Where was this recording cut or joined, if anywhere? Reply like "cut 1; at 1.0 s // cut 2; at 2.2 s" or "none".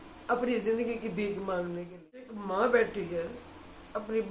cut 1; at 2.3 s